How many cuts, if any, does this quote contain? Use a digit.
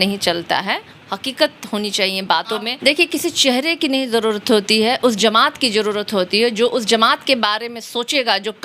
1